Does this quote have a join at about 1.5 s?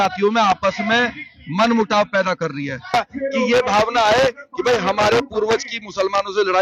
no; 1 cut; at 2.9 s

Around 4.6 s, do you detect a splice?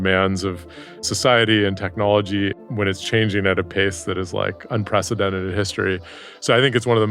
no; 2 cuts; at 1.1 s, 2.6 s

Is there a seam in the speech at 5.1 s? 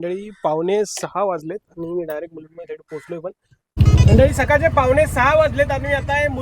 no; 1 cut; at 3.7 s

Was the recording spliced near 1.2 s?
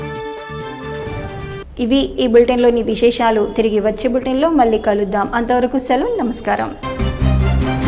no; 0 cuts

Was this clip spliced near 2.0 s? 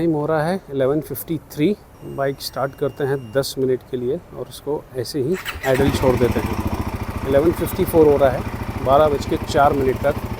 yes; 1 cut; at 2.0 s

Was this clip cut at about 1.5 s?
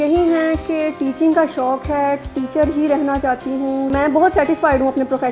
no; 1 cut; at 3.9 s

